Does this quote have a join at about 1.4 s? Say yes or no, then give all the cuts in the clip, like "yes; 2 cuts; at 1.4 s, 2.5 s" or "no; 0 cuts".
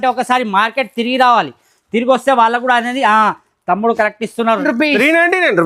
no; 1 cut; at 4.6 s